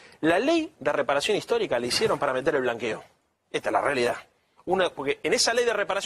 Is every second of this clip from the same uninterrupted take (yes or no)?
yes